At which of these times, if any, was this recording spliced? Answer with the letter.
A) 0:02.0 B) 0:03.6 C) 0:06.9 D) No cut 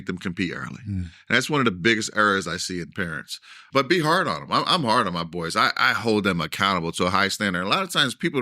B